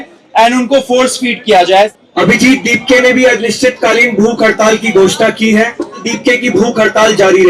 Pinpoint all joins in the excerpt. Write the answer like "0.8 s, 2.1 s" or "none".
1.9 s, 6.1 s

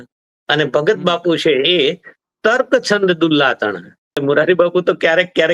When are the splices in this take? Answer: 4.2 s

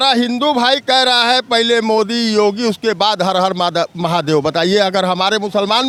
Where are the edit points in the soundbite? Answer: none

